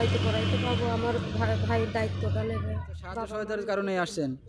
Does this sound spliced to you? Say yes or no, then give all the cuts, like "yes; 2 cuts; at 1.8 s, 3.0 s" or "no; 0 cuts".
yes; 1 cut; at 3.3 s